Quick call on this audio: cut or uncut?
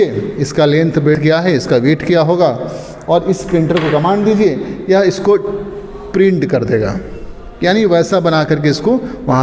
cut